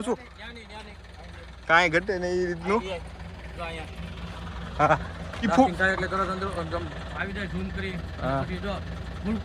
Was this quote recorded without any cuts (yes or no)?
yes